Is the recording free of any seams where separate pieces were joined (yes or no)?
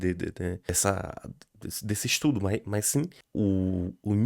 no